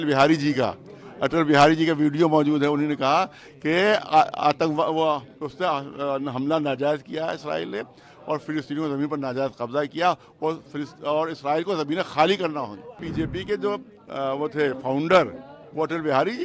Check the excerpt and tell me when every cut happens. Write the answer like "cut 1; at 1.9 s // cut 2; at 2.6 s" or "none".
cut 1; at 13.0 s

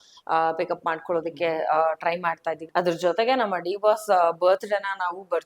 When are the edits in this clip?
cut 1; at 2.6 s

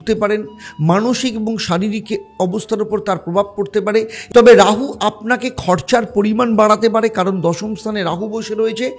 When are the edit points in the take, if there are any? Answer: cut 1; at 4.2 s

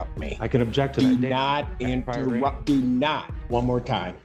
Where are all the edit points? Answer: cut 1; at 3.3 s

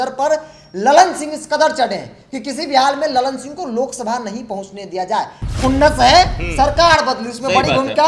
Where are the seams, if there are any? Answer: none

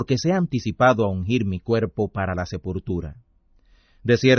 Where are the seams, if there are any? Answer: cut 1; at 1.7 s

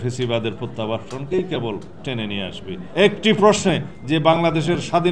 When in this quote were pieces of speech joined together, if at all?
cut 1; at 2.8 s

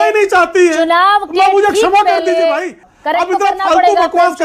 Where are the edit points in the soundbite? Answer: cut 1; at 2.8 s

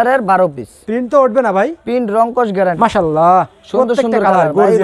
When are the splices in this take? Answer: cut 1; at 2.8 s

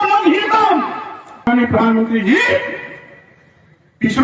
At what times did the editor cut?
cut 1; at 1.5 s

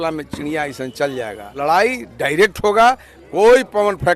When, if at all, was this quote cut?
cut 1; at 1.5 s

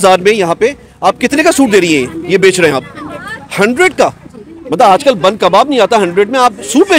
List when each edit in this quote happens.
none

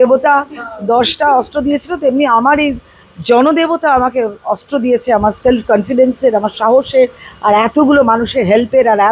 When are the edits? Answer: none

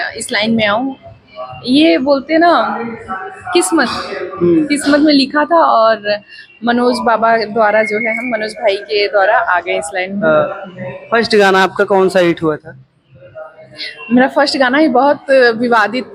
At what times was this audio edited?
none

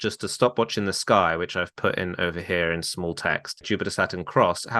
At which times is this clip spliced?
cut 1; at 3.7 s

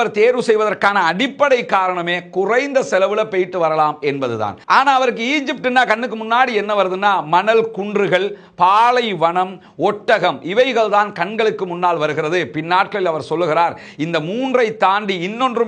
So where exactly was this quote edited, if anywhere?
none

